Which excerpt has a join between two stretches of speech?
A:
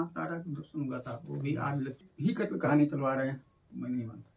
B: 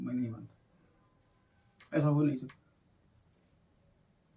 A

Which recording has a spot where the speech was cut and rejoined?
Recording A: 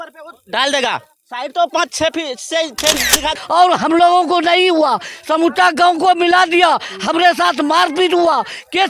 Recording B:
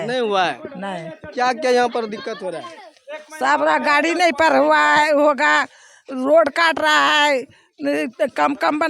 A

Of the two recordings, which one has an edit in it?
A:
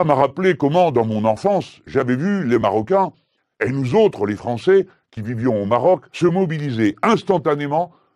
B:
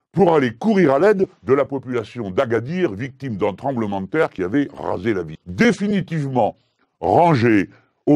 B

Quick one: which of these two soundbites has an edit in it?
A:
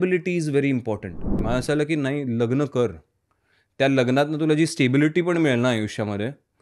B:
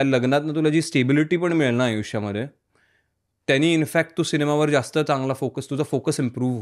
A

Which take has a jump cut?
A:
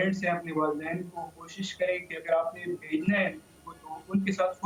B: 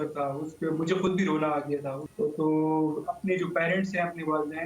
B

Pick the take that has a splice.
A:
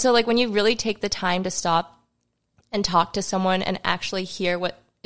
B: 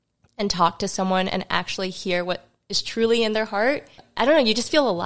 B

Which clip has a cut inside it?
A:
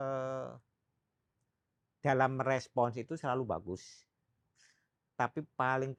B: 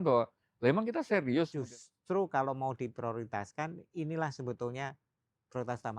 B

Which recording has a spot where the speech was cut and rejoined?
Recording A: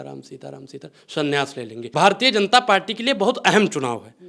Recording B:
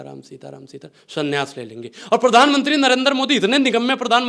A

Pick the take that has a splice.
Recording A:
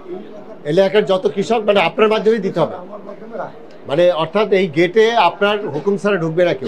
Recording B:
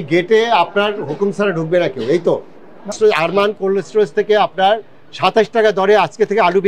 B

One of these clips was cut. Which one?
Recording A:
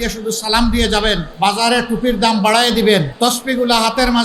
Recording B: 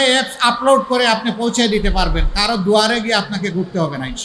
A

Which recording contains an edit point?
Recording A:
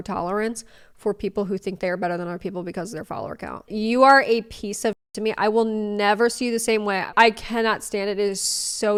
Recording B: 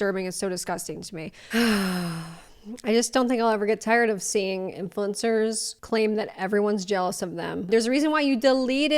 B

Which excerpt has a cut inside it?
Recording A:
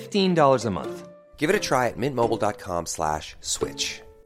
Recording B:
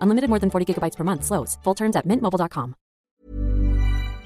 B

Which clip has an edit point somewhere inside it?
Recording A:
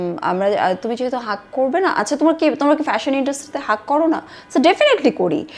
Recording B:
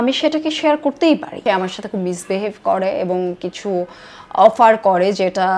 B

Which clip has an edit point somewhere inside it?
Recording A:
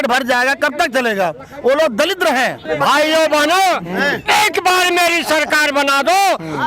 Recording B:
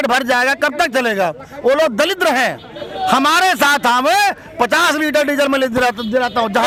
A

